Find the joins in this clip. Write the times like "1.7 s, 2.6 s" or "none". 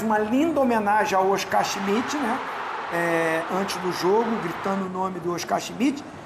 none